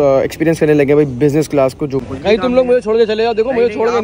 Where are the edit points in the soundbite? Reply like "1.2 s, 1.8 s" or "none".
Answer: 2.0 s